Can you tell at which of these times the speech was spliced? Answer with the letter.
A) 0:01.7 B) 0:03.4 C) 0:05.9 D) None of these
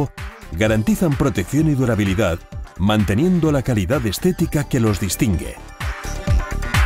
C